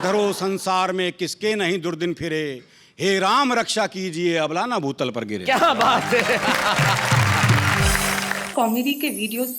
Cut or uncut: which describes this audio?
cut